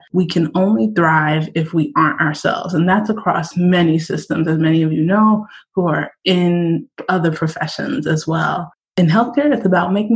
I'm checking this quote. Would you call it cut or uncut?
uncut